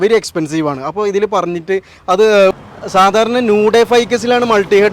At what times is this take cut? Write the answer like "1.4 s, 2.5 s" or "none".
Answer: 2.5 s